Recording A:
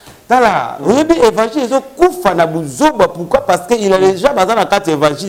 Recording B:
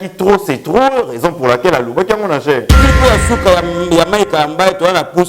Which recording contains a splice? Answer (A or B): B